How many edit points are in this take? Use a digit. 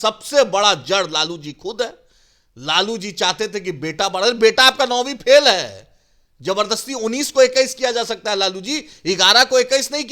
0